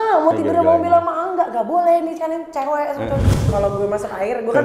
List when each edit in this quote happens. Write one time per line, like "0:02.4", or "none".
0:03.5